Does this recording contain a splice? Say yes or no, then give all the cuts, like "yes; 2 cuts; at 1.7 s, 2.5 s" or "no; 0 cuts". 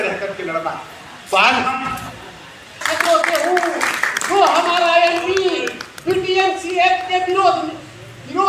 yes; 1 cut; at 2.8 s